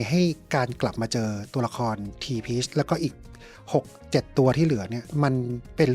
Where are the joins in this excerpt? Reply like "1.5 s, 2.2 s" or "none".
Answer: none